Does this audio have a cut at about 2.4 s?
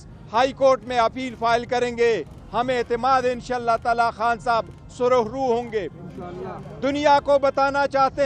no; 0 cuts

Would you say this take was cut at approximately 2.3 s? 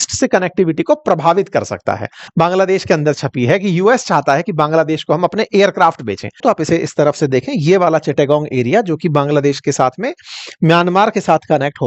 yes; 2 cuts; at 2.3 s, 6.4 s

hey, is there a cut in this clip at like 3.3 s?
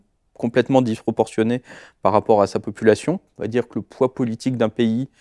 yes; 1 cut; at 3.3 s

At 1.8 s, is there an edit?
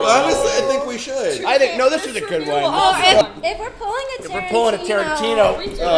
no; 1 cut; at 3.2 s

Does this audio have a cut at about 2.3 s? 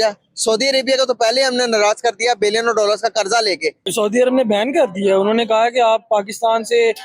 no; 1 cut; at 3.9 s

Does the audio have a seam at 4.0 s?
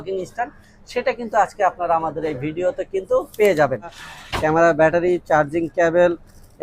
yes; 1 cut; at 4.0 s

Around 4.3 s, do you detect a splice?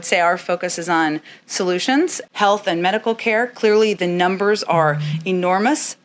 no; 1 cut; at 2.2 s

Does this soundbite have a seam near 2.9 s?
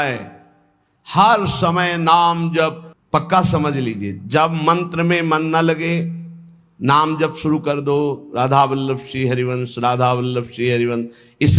yes; 1 cut; at 2.9 s

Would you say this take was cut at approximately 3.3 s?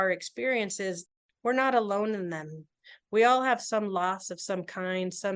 no; 1 cut; at 1.1 s

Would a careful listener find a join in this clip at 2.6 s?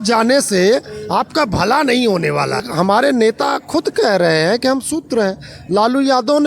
yes; 1 cut; at 2.6 s

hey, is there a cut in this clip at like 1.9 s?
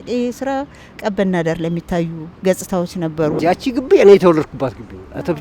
no; 1 cut; at 3.4 s

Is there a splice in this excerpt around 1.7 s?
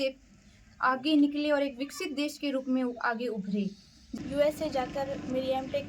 no; 1 cut; at 4.2 s

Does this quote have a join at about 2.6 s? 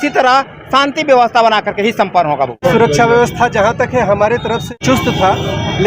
yes; 2 cuts; at 2.6 s, 4.7 s

